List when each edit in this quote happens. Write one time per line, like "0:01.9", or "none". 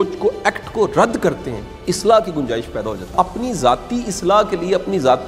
0:03.1